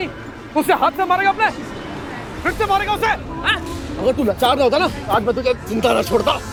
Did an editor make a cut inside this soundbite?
no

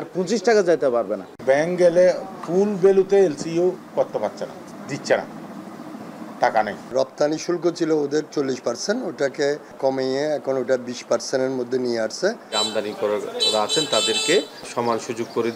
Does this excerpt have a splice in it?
yes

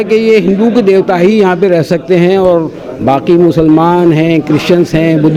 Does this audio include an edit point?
no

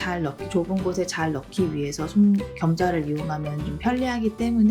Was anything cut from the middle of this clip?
no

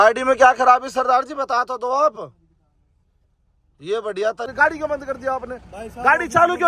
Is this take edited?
yes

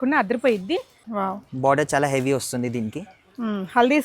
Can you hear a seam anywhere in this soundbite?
yes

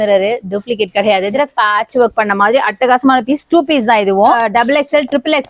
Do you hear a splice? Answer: yes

